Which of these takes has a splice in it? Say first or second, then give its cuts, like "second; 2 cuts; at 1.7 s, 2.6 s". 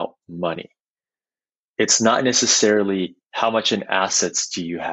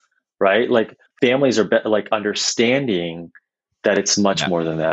second; 1 cut; at 1.0 s